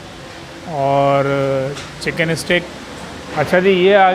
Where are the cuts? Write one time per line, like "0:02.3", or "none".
0:03.2

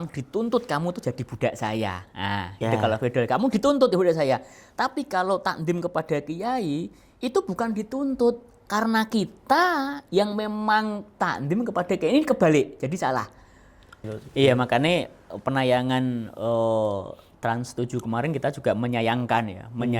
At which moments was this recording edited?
0:14.0

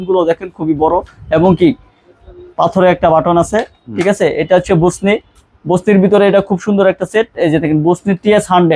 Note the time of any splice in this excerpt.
none

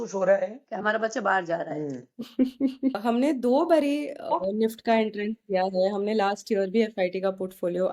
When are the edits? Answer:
0:02.9

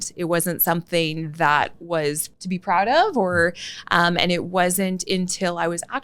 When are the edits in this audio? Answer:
0:02.3

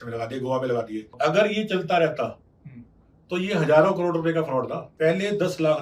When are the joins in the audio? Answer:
0:01.0
0:04.8

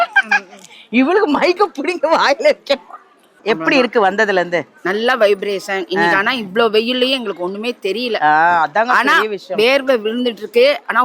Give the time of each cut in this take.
0:03.3

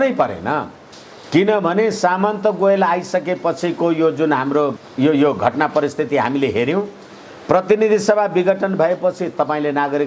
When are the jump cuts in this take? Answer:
0:04.8

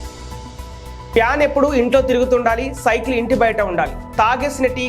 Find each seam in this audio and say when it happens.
none

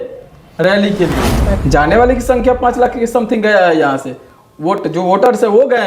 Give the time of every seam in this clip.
0:01.6

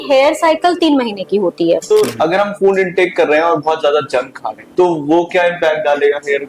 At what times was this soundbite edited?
0:01.9

